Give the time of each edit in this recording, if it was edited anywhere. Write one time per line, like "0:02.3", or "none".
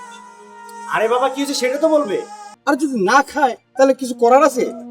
0:02.4